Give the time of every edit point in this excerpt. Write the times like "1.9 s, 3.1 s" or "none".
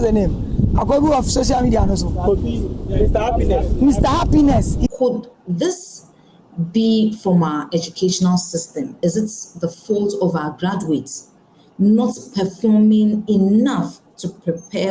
4.9 s, 8.9 s